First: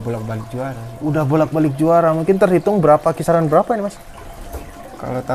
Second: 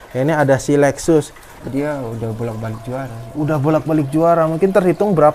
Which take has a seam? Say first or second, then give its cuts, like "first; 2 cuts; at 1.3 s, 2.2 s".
second; 1 cut; at 1.4 s